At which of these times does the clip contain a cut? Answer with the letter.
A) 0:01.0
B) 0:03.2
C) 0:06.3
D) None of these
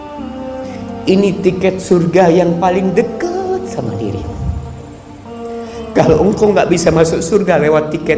A